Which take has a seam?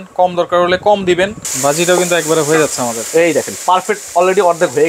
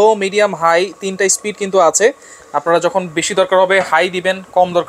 first; 1 cut; at 1.4 s

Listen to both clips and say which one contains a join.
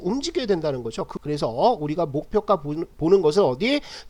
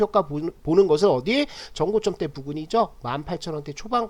first; 1 cut; at 1.1 s

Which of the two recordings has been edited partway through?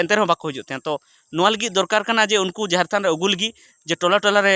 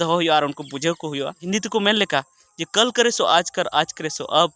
second; 1 cut; at 1.4 s

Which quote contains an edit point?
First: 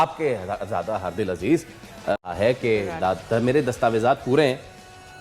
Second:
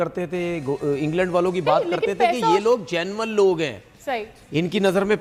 first; 1 cut; at 2.1 s

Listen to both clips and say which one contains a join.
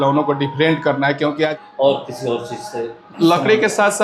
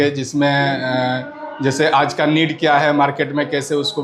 first; 1 cut; at 1.6 s

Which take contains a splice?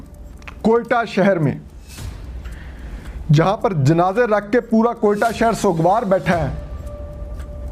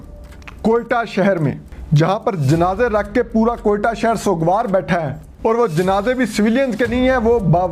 second; 2 cuts; at 1.7 s, 5.2 s

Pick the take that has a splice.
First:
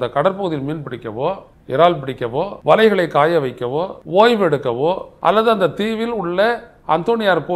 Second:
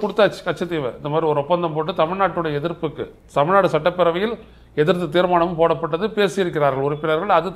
first; 4 cuts; at 1.5 s, 2.5 s, 4.0 s, 5.1 s

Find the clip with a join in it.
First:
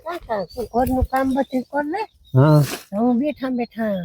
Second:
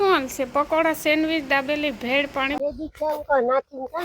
second; 1 cut; at 2.6 s

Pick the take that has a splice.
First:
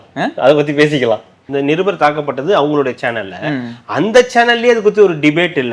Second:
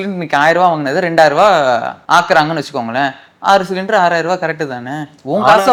first; 1 cut; at 1.4 s

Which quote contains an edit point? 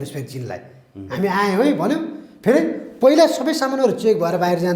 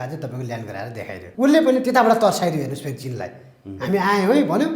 second; 1 cut; at 1.2 s

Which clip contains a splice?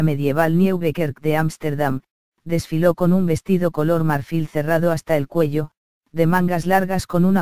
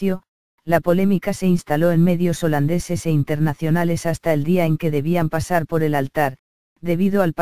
second; 1 cut; at 1.5 s

